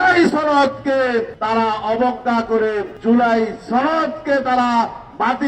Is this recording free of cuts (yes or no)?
no